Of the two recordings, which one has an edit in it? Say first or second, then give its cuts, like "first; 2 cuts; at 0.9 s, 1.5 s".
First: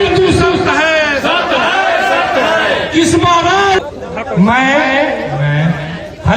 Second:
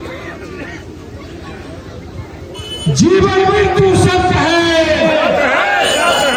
first; 1 cut; at 3.8 s